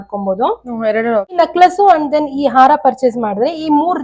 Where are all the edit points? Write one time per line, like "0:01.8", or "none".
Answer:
0:01.4